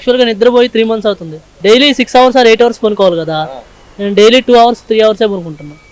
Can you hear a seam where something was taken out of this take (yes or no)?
yes